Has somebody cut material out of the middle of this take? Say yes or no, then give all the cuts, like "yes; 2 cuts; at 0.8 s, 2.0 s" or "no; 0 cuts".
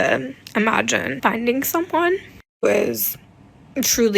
yes; 1 cut; at 1.1 s